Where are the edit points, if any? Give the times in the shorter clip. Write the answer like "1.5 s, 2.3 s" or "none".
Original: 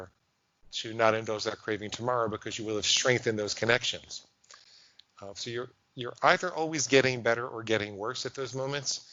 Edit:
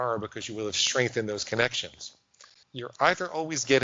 2.6 s